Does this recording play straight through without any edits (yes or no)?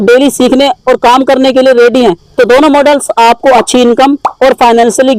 yes